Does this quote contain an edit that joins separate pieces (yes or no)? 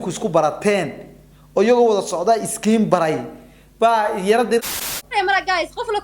yes